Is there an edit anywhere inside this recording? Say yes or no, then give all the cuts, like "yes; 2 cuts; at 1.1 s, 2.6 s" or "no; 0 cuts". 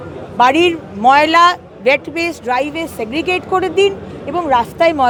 no; 0 cuts